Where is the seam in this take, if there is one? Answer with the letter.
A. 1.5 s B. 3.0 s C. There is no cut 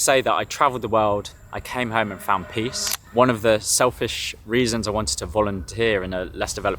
B